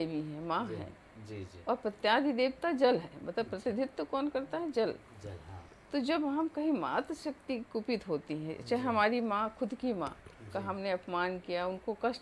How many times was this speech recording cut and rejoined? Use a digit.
0